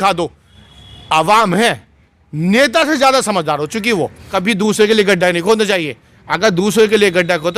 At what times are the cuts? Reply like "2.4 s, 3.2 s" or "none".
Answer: 4.3 s